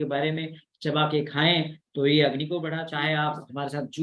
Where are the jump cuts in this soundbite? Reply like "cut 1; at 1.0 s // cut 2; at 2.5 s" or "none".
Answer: cut 1; at 2.8 s